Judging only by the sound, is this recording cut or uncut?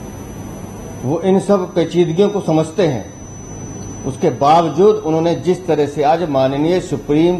uncut